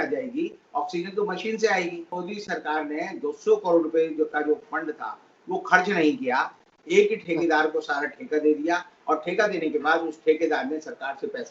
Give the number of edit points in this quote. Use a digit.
1